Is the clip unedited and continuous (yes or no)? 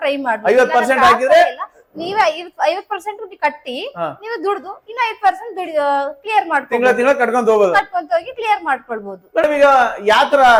yes